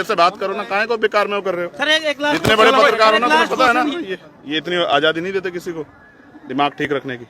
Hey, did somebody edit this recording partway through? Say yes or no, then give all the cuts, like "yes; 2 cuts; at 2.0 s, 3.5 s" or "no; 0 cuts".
yes; 1 cut; at 3.9 s